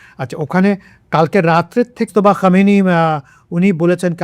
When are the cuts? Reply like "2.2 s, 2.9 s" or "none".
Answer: 2.1 s